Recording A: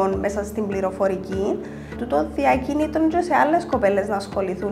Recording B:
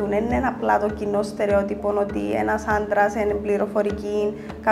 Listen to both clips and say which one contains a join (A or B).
A